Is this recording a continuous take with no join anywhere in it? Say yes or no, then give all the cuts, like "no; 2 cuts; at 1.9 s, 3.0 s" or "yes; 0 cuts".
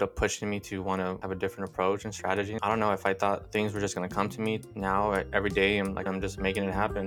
no; 5 cuts; at 1.2 s, 2.5 s, 3.5 s, 4.6 s, 6.0 s